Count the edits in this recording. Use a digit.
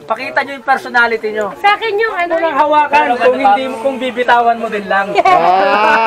1